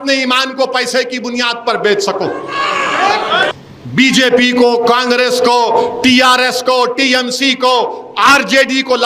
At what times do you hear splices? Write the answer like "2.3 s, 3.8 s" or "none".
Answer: 3.5 s